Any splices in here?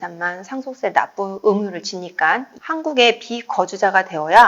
yes; 2 cuts; at 1.3 s, 2.5 s

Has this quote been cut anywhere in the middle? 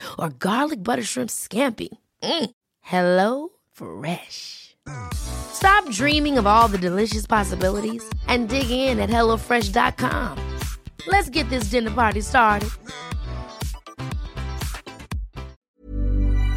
yes; 1 cut; at 15.6 s

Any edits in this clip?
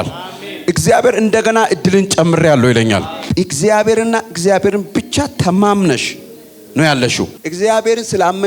yes; 1 cut; at 3.2 s

